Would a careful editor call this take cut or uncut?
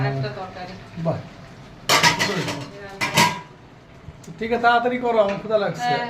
uncut